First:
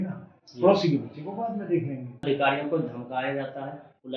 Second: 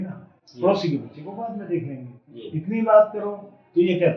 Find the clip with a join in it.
first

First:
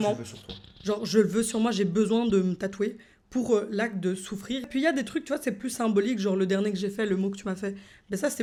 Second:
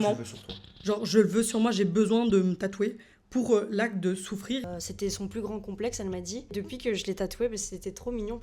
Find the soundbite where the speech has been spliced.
second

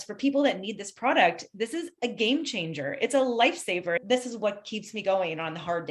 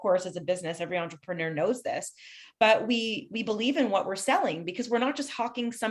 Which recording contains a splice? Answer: first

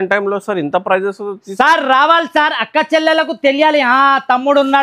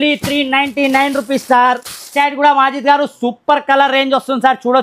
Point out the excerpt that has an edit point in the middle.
second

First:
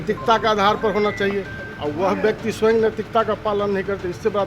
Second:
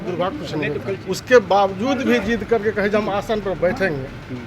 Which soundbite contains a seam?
second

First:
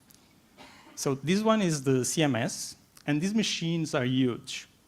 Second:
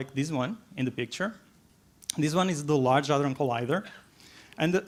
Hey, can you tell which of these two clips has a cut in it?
first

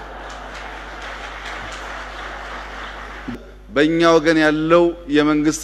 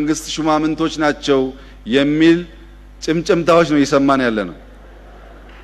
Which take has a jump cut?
first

